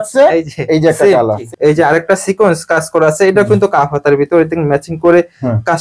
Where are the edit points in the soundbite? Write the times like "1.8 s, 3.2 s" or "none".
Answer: 1.4 s